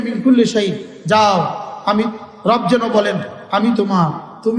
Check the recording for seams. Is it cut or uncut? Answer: uncut